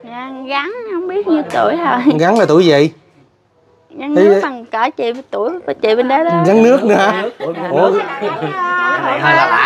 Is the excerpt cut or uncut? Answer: uncut